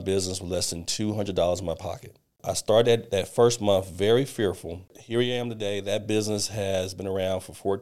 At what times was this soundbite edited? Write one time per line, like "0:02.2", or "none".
0:02.5
0:05.0